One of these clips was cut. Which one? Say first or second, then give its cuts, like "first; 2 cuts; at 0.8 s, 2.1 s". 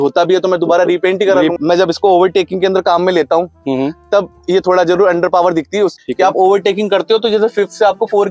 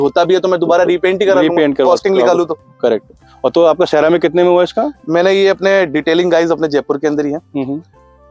first; 2 cuts; at 1.5 s, 6.0 s